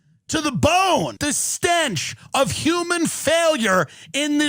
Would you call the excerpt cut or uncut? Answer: cut